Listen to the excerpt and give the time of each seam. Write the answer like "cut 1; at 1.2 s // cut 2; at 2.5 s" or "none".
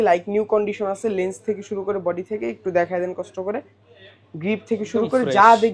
none